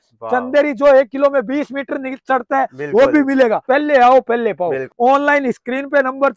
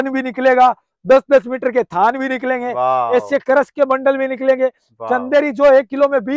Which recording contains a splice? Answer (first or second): first